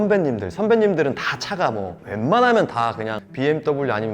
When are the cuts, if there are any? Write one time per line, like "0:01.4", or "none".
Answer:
none